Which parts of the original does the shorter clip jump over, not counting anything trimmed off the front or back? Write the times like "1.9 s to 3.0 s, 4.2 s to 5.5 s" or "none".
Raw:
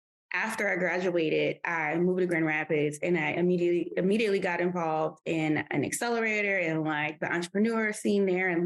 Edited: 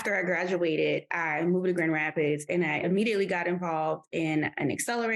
3.3 s to 3.9 s

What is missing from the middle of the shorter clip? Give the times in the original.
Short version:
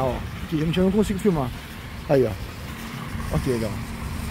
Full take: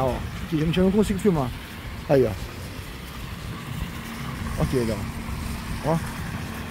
2.7 s to 3.9 s

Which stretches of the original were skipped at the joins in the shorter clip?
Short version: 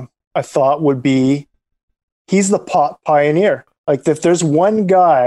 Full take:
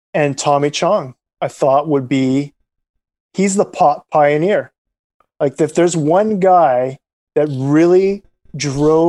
4.8 s to 5.2 s

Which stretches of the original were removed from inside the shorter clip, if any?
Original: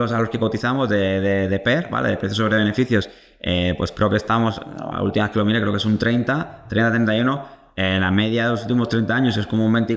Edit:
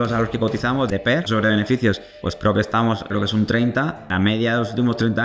0.9 s to 2.0 s, 3.3 s to 3.8 s, 4.7 s to 5.6 s, 6.6 s to 8.0 s

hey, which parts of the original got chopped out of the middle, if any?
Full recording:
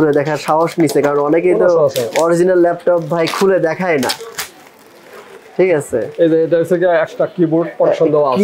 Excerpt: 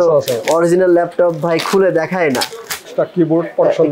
4.6 s to 7.1 s

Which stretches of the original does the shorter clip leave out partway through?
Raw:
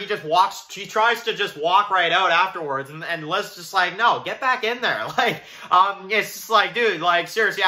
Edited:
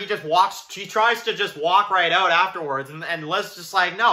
none

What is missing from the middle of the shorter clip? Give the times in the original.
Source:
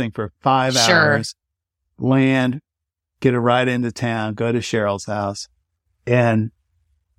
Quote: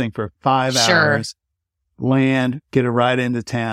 2.6 s to 3.1 s

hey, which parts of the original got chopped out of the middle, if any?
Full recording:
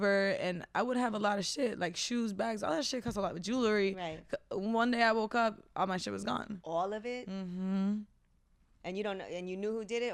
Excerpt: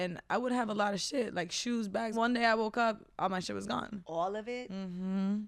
2.6 s to 4.7 s

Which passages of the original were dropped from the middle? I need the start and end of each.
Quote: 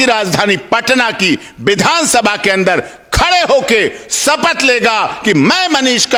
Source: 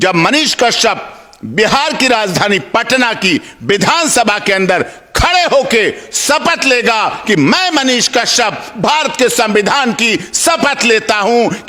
none

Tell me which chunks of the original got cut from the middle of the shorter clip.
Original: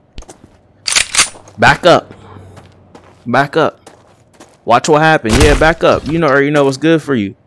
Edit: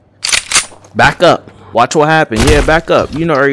2.2 s to 4.5 s

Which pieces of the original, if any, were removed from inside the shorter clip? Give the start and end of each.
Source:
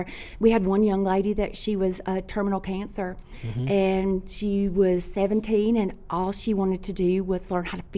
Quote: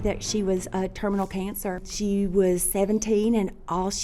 3.2 s to 4.3 s

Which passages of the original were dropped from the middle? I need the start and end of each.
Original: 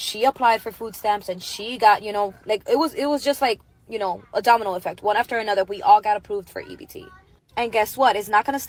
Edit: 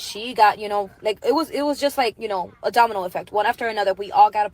3.6 s to 3.9 s

